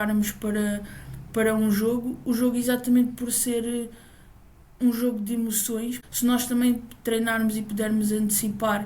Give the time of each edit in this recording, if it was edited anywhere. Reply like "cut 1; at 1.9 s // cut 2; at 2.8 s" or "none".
cut 1; at 6.0 s